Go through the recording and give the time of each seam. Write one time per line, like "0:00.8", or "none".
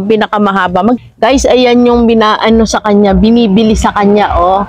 0:01.0